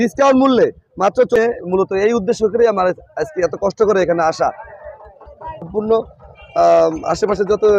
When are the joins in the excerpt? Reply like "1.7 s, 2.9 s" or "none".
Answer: 1.4 s, 5.6 s